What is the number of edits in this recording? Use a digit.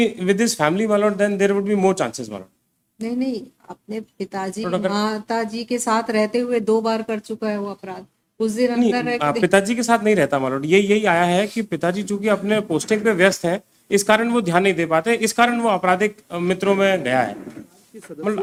0